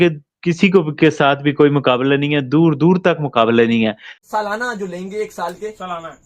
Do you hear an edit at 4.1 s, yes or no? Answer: yes